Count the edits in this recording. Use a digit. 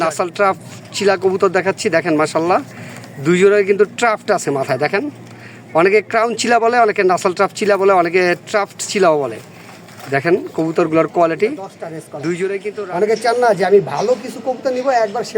1